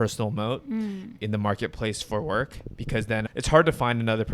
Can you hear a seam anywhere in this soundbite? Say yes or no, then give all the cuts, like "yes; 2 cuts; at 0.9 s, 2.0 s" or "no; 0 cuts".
yes; 1 cut; at 3.3 s